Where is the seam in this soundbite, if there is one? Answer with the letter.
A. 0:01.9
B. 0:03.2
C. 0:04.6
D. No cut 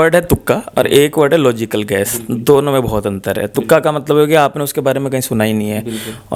D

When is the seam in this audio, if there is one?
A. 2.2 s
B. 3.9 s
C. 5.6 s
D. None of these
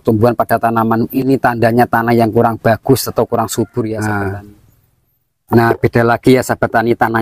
B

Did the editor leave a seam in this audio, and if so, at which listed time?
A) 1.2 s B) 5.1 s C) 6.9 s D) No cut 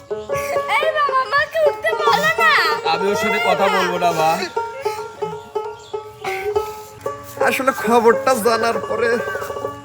C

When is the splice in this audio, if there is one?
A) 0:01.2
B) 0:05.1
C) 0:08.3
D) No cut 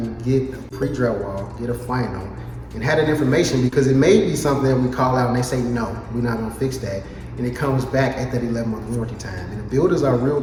D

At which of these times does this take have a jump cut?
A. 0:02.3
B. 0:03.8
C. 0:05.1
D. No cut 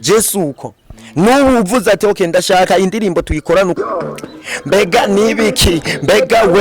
B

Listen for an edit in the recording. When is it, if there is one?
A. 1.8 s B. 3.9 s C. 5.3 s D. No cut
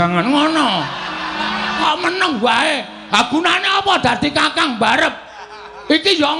A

